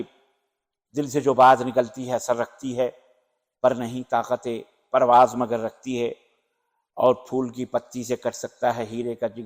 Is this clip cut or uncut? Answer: uncut